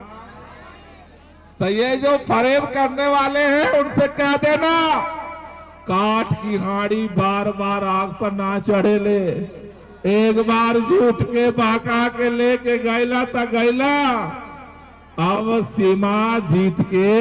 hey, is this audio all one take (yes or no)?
yes